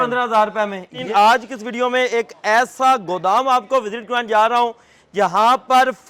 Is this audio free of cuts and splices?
no; 1 cut; at 1.0 s

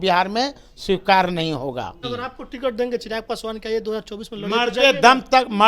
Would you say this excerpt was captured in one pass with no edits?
no; 1 cut; at 2.0 s

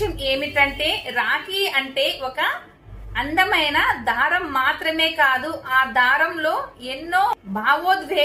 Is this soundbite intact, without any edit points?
yes; 0 cuts

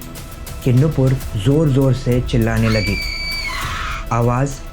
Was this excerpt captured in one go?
yes; 0 cuts

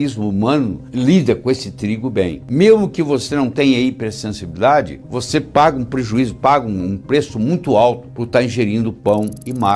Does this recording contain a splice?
no; 0 cuts

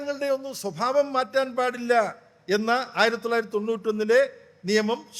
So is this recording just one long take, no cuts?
yes; 0 cuts

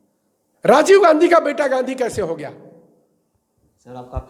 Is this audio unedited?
yes; 0 cuts

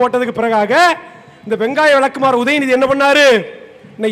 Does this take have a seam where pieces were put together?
no; 0 cuts

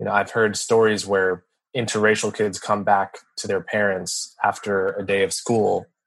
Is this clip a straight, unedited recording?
no; 1 cut; at 1.6 s

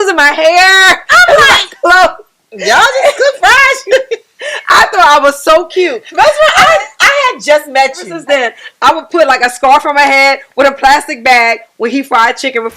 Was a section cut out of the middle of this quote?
yes; 1 cut; at 8.1 s

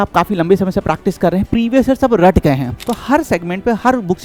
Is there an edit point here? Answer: yes; 1 cut; at 2.8 s

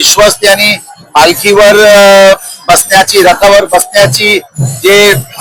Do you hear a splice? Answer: no; 0 cuts

